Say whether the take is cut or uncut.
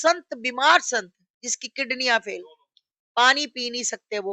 uncut